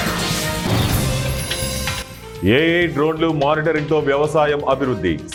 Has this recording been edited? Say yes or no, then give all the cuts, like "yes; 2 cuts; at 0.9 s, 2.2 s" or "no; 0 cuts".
no; 0 cuts